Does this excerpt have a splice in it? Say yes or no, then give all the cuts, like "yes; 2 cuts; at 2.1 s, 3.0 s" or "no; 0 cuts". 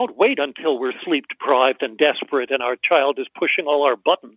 no; 0 cuts